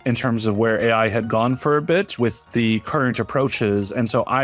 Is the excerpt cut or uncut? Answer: cut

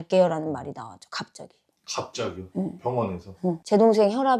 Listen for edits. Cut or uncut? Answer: uncut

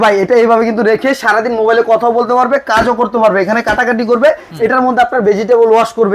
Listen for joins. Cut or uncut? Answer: uncut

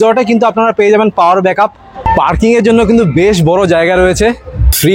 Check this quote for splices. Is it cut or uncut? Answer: uncut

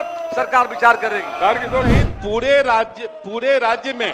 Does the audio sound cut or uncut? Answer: cut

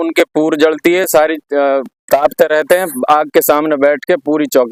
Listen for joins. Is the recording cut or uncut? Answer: uncut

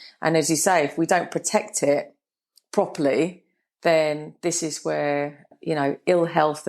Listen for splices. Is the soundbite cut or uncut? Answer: cut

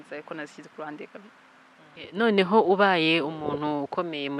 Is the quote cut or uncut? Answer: cut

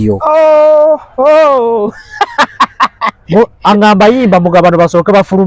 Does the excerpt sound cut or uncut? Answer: uncut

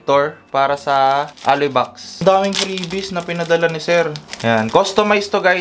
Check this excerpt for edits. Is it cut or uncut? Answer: uncut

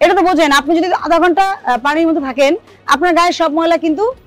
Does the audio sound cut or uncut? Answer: uncut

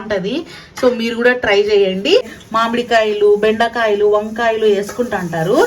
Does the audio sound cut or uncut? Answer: cut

